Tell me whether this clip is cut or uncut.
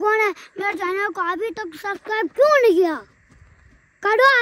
uncut